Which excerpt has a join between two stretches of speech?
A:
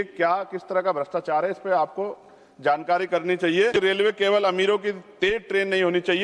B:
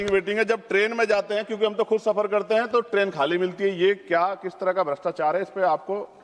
A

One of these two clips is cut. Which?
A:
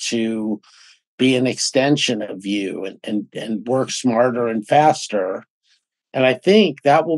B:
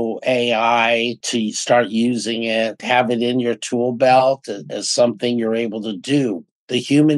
B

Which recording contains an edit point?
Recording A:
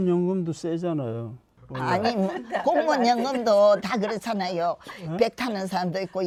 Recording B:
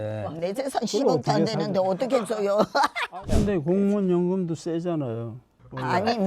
B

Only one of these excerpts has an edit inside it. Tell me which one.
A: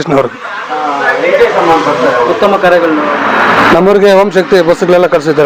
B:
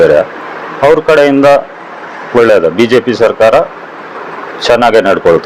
A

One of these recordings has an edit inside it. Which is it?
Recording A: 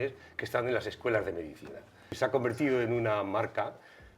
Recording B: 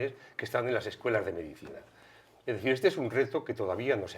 A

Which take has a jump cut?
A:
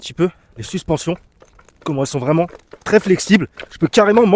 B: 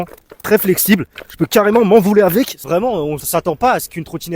B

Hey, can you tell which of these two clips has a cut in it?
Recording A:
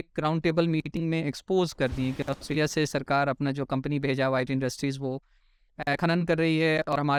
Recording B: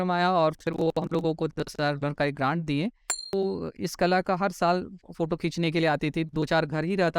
B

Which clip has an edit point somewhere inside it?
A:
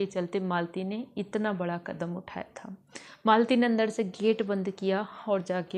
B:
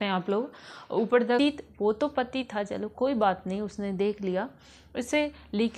B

